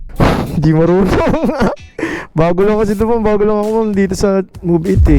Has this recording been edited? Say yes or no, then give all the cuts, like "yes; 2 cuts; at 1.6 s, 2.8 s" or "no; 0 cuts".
no; 0 cuts